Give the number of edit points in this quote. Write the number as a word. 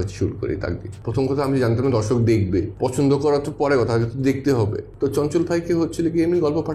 three